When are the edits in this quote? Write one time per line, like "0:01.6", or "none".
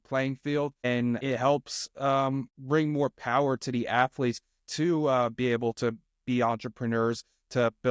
0:02.5

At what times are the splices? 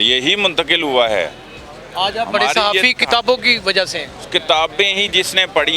none

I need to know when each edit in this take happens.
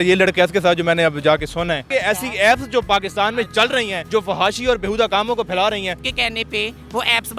0:01.9
0:06.1

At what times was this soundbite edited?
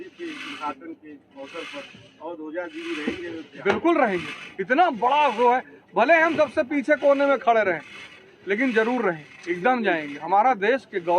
none

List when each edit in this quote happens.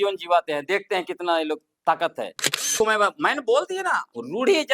0:02.7

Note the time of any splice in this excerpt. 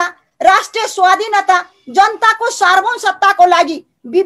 none

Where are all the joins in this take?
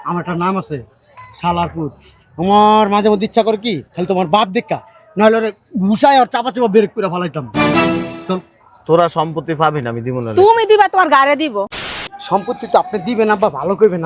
0:11.8

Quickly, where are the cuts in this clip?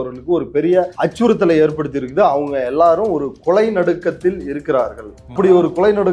0:00.9
0:05.3

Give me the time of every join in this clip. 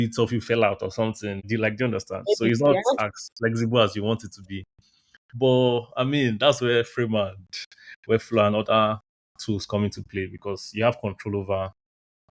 0:01.4

